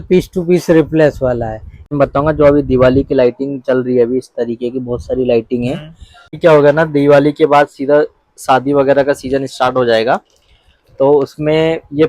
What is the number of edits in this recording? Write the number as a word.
two